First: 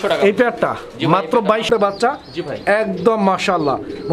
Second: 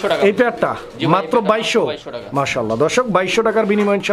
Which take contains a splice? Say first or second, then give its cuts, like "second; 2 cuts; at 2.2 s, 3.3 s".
first; 1 cut; at 1.7 s